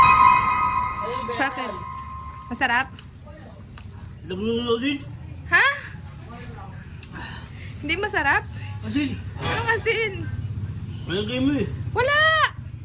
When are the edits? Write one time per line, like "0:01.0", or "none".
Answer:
0:01.3